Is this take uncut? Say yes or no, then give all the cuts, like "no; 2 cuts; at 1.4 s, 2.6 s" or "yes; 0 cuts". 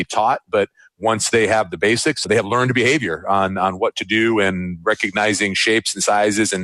no; 1 cut; at 2.3 s